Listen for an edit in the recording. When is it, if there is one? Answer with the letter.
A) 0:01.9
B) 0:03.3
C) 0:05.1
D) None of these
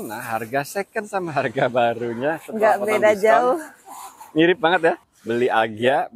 C